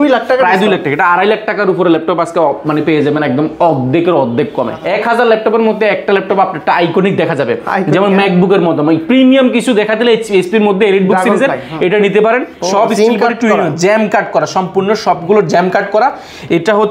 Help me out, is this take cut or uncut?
cut